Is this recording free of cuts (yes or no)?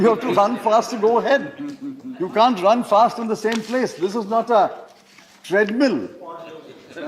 yes